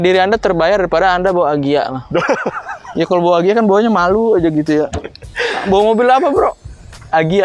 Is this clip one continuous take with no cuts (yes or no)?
yes